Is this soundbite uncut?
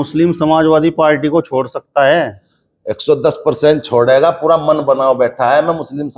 yes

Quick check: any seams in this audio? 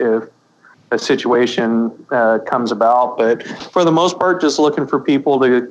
no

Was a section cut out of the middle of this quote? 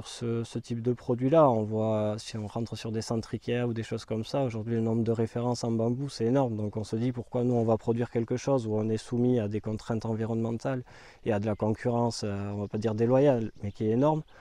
no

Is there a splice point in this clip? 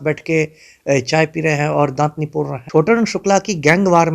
yes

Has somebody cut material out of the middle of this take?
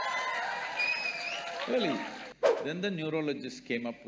yes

